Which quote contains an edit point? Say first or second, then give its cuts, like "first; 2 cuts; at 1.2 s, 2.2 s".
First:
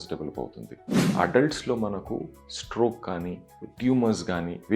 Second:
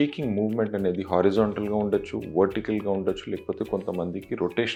first; 1 cut; at 1.1 s